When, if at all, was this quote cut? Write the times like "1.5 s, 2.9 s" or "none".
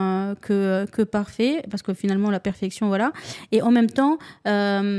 none